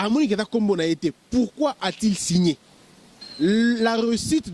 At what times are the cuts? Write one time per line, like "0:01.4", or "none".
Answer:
0:03.2